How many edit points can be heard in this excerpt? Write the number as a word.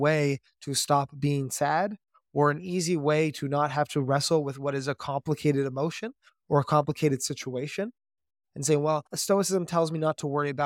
two